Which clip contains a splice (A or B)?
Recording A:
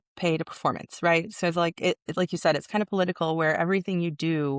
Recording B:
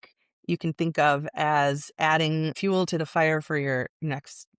B